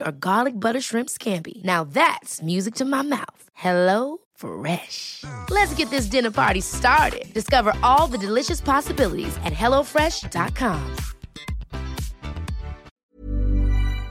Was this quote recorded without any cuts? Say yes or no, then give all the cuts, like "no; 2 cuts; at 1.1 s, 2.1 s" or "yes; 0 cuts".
no; 1 cut; at 12.9 s